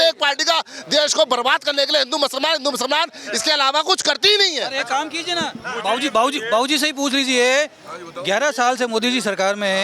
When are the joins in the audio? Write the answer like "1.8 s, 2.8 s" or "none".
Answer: none